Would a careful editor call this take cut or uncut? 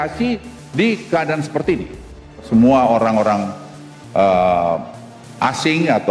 cut